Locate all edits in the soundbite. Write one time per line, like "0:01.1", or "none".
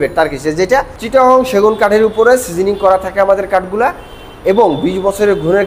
0:01.0